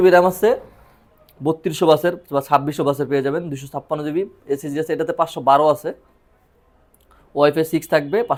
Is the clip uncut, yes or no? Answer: yes